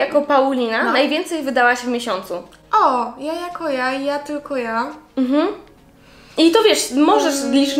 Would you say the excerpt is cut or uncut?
uncut